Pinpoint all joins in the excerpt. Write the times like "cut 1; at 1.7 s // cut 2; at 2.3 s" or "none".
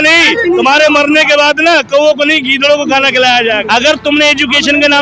cut 1; at 3.6 s

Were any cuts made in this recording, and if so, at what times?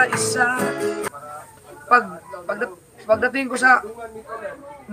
cut 1; at 1.1 s

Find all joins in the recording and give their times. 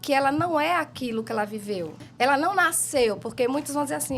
cut 1; at 2.0 s

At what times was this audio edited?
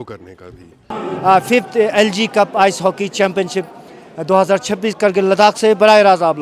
cut 1; at 1.0 s

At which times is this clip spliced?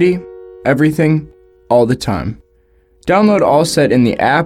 none

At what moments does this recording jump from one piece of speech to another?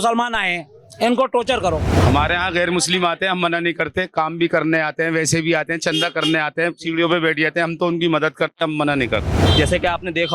cut 1; at 1.9 s // cut 2; at 9.4 s

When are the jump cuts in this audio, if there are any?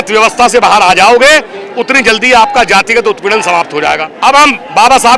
cut 1; at 4.1 s

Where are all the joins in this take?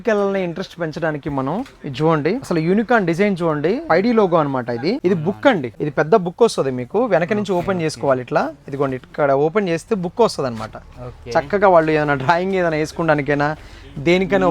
cut 1; at 2.5 s // cut 2; at 3.8 s // cut 3; at 5.0 s // cut 4; at 5.7 s

